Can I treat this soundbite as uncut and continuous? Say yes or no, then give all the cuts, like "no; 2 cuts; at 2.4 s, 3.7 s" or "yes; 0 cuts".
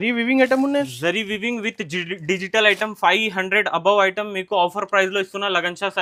yes; 0 cuts